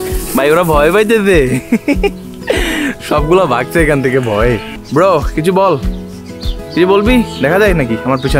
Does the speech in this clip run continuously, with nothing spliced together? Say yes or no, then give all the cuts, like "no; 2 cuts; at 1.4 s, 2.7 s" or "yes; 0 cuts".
no; 1 cut; at 4.7 s